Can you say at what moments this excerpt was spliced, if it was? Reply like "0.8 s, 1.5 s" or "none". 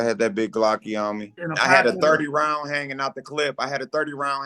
1.4 s